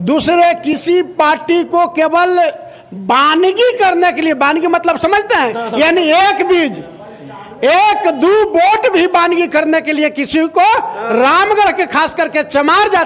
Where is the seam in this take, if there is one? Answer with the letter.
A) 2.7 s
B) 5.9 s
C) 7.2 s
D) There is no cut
D